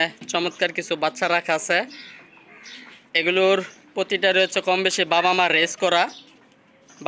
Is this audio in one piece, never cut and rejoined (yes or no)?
yes